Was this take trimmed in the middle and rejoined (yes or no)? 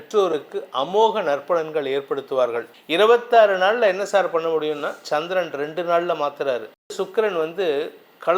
yes